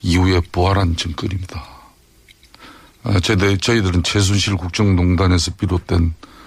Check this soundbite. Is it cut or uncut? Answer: uncut